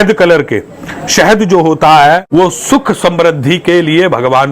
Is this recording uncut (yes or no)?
no